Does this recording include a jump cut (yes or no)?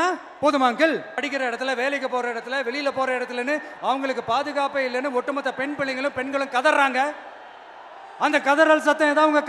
yes